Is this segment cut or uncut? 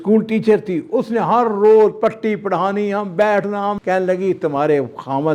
cut